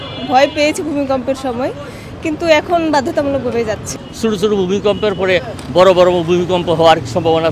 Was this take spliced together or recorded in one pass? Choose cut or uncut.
cut